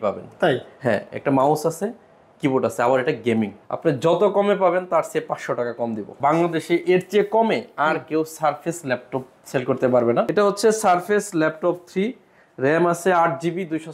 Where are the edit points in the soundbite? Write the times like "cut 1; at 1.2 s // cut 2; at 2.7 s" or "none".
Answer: cut 1; at 3.6 s // cut 2; at 6.1 s // cut 3; at 10.3 s